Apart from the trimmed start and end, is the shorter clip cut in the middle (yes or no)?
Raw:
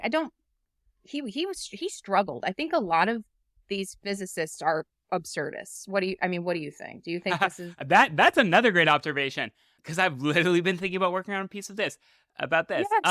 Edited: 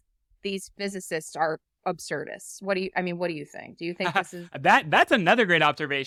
no